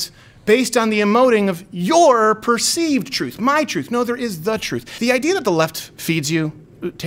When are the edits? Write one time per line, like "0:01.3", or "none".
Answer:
0:04.9